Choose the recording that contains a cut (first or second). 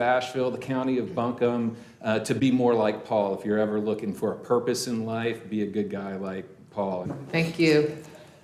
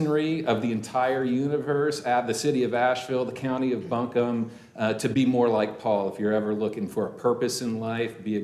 first